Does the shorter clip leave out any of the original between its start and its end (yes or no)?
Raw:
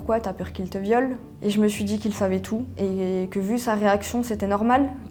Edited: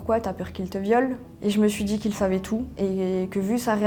no